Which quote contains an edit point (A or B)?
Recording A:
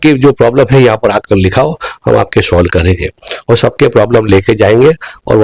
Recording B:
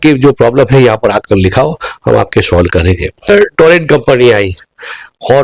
B